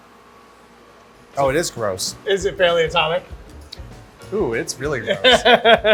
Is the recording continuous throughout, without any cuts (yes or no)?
yes